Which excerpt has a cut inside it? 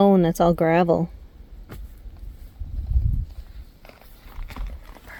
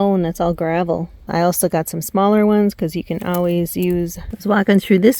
second; 2 cuts; at 1.3 s, 4.2 s

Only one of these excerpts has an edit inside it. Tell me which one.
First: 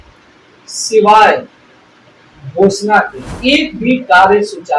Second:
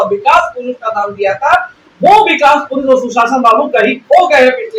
first; 1 cut; at 3.2 s

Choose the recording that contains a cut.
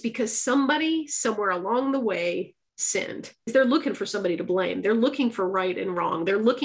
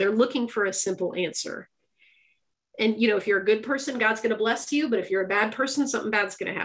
first; 1 cut; at 3.5 s

